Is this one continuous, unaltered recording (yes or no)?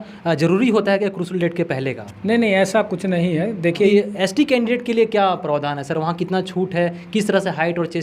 no